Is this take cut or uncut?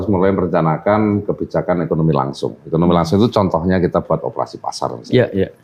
uncut